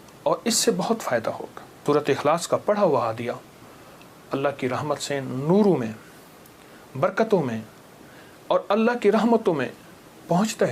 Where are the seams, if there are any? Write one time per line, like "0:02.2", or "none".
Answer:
0:01.8